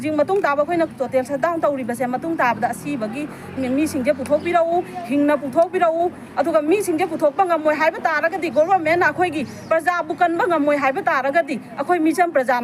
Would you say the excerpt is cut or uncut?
uncut